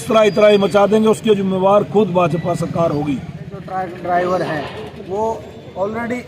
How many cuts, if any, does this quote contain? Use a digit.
1